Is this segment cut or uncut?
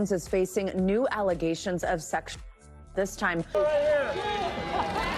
uncut